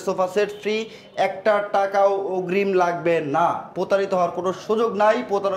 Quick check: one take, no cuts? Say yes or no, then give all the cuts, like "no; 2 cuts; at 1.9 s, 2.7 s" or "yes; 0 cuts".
yes; 0 cuts